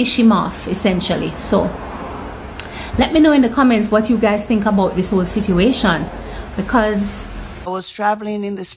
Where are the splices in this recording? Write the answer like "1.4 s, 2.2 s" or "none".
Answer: 7.7 s